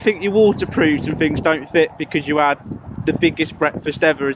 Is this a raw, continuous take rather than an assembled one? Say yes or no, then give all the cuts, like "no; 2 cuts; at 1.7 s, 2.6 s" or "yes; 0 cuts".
yes; 0 cuts